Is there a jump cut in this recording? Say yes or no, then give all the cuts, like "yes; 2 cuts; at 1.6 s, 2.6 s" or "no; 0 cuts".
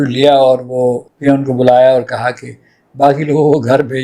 yes; 1 cut; at 1.1 s